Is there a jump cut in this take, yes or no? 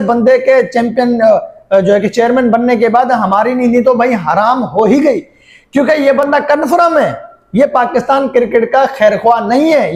no